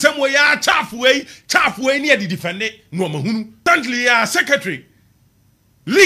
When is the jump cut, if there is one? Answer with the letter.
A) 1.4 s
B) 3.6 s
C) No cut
B